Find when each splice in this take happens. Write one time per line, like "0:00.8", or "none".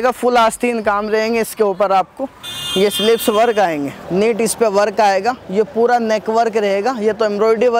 0:04.0